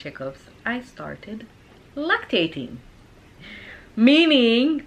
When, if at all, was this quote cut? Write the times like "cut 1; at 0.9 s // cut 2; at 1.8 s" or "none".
none